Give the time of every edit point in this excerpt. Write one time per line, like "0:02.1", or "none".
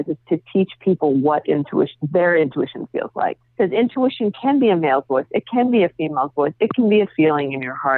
0:03.4